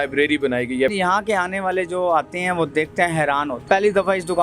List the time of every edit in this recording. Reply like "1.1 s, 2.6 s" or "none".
0.9 s, 3.6 s